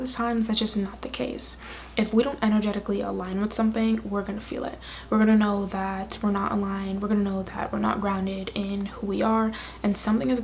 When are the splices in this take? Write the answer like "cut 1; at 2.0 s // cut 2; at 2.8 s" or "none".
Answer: none